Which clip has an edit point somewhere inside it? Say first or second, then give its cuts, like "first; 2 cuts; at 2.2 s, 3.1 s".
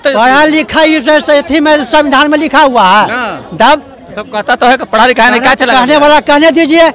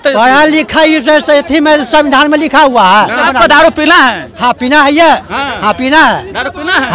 second; 1 cut; at 3.3 s